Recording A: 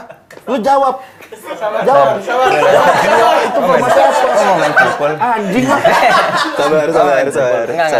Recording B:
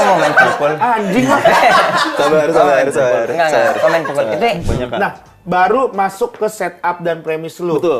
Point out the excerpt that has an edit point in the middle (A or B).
B